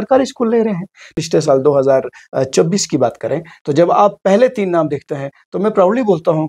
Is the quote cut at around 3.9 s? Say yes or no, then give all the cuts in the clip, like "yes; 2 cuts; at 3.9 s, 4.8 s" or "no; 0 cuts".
no; 1 cut; at 1.1 s